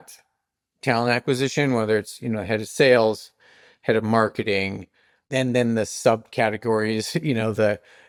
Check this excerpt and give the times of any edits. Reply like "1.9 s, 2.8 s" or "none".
none